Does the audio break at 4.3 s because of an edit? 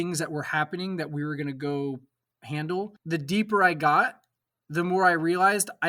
no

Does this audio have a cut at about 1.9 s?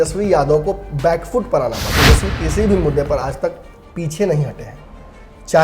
yes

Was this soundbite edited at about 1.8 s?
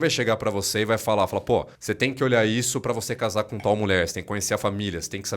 yes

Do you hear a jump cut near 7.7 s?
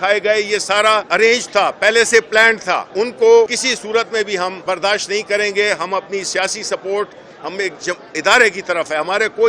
no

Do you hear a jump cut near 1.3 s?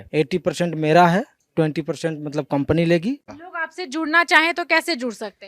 no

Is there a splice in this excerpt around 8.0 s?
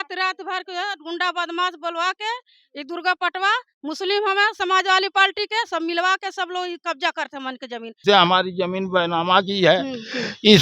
yes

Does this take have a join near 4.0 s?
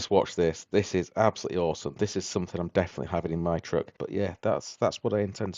yes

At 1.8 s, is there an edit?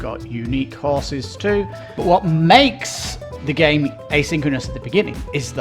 yes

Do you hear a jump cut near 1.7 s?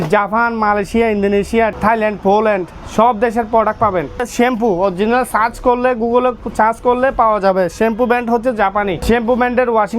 yes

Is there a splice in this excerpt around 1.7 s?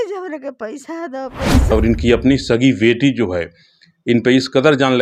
yes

